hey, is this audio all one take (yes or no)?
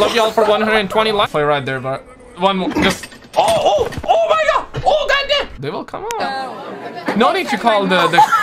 no